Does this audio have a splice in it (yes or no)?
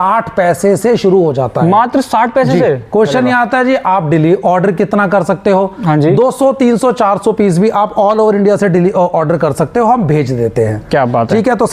no